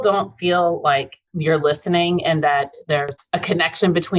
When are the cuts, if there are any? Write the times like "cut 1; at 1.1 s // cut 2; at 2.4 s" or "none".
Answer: cut 1; at 1.3 s // cut 2; at 3.1 s

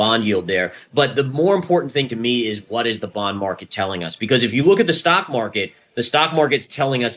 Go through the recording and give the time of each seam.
none

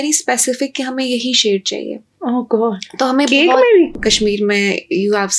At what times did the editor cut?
cut 1; at 3.9 s

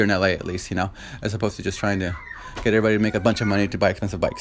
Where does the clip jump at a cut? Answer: none

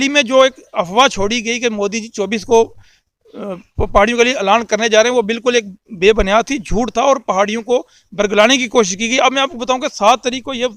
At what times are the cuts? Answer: none

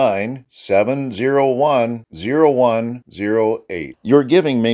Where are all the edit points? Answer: none

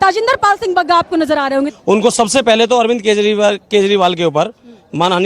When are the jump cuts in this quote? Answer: cut 1; at 1.7 s

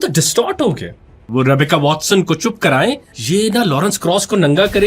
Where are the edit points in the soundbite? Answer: cut 1; at 1.2 s // cut 2; at 3.1 s

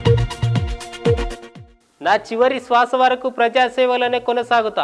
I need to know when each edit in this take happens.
cut 1; at 1.3 s

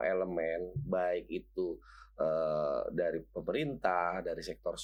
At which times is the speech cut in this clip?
none

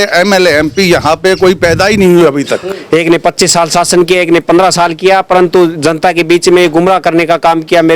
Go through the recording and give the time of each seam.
cut 1; at 2.7 s

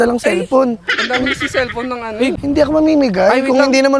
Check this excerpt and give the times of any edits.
cut 1; at 2.3 s

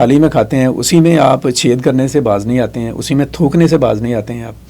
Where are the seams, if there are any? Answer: none

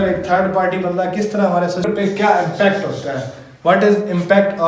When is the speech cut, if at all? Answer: cut 1; at 1.8 s

